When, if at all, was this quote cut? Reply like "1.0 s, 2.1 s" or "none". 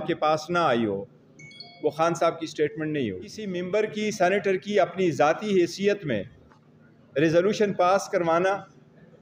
3.4 s

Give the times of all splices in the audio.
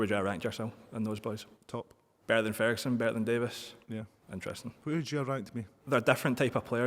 none

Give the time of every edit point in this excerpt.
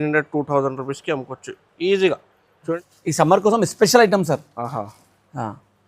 2.7 s

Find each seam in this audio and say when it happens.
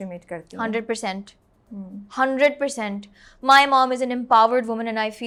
none

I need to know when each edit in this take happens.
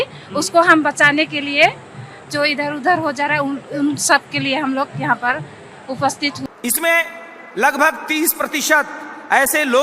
6.4 s

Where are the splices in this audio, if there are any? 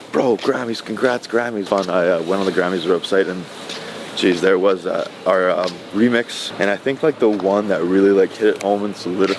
1.6 s, 6.4 s

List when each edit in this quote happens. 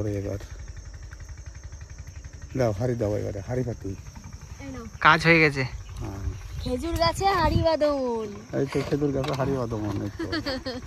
none

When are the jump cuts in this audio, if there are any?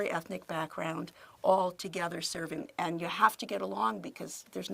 2.6 s

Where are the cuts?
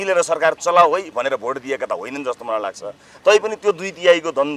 none

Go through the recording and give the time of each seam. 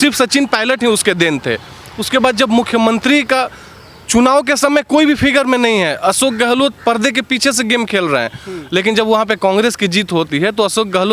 none

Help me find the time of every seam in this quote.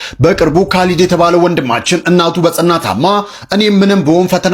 none

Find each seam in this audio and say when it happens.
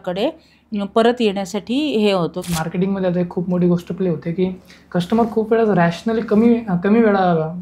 2.4 s

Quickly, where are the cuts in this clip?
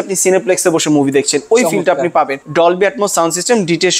2.4 s

